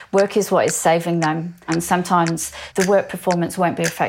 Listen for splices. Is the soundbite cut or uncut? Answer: cut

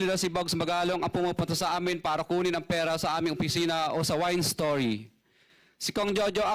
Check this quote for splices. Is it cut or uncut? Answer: cut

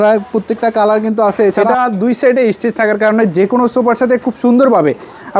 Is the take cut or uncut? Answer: cut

